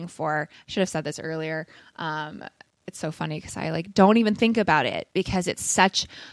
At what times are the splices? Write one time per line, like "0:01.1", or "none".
none